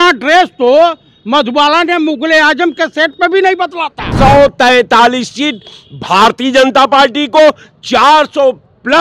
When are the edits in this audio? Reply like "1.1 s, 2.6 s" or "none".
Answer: 4.1 s